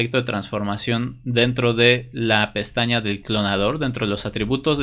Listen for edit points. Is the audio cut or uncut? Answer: uncut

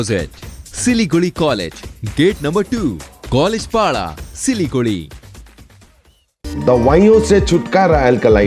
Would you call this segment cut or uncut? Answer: uncut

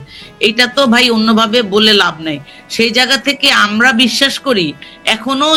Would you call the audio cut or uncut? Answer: uncut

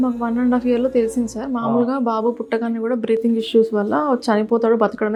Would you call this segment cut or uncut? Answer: uncut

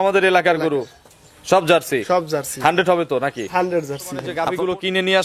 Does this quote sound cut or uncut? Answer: cut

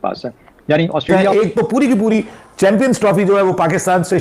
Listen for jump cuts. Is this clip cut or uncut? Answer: cut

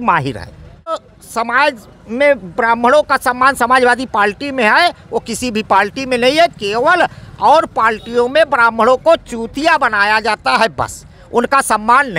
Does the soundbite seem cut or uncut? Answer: cut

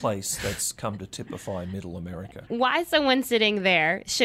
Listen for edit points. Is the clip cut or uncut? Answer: cut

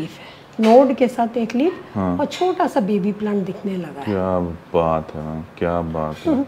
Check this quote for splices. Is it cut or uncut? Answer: uncut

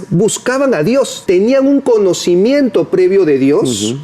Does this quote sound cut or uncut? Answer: cut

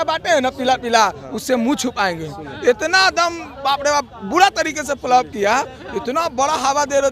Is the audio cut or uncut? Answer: uncut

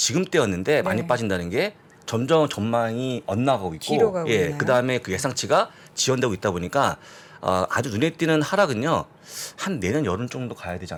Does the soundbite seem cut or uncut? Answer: uncut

